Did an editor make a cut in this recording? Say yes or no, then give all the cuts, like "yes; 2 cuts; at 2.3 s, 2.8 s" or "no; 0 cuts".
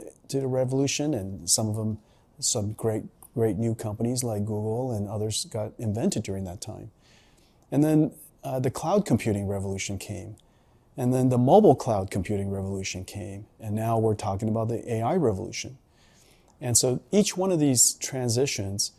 no; 0 cuts